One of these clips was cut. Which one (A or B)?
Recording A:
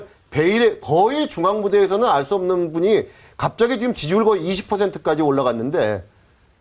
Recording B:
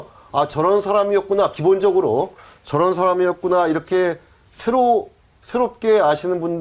B